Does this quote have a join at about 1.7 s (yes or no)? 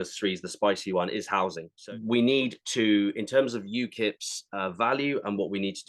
yes